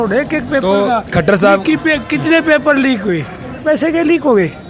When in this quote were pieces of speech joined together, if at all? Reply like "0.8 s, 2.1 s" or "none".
3.6 s